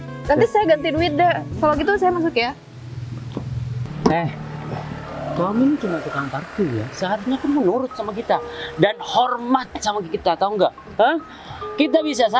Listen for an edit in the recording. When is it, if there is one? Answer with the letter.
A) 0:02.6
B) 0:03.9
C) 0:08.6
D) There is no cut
B